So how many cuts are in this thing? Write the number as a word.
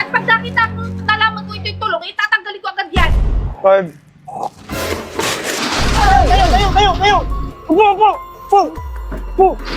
one